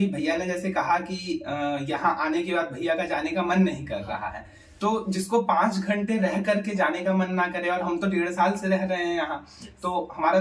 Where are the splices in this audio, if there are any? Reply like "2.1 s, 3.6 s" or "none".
none